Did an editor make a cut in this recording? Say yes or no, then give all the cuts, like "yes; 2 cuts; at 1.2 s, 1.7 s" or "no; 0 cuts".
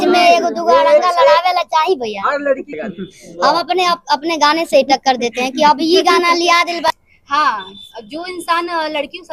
yes; 2 cuts; at 2.7 s, 6.9 s